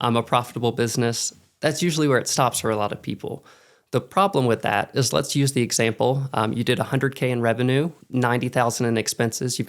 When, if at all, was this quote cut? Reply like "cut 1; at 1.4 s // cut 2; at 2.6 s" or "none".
cut 1; at 8.0 s